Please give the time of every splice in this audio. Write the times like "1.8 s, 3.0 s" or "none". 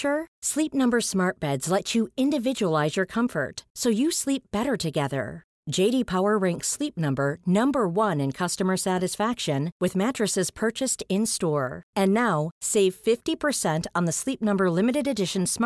none